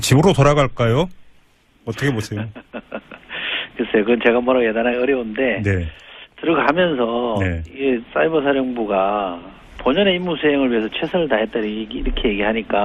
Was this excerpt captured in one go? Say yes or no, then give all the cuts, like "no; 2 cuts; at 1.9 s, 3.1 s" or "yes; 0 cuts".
yes; 0 cuts